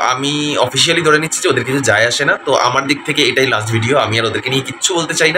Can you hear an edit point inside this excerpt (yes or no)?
no